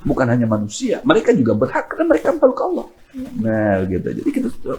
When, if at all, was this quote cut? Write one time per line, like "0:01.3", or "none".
none

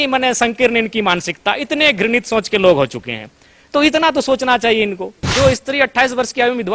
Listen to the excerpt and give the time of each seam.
0:05.3

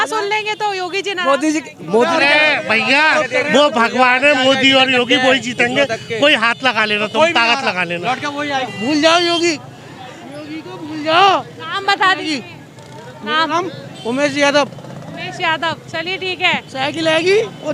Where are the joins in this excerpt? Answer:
0:02.1
0:08.7

